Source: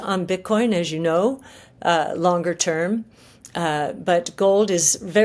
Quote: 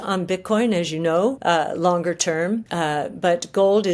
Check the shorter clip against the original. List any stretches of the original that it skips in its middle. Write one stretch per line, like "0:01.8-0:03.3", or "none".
0:01.4-0:01.8
0:03.1-0:03.5